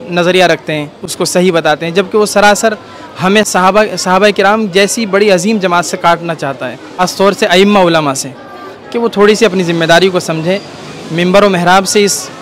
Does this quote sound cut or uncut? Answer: cut